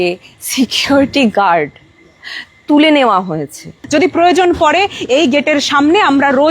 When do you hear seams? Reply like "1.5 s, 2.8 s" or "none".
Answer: 3.7 s